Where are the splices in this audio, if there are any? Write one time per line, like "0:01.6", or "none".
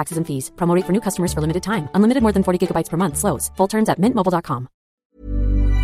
0:05.0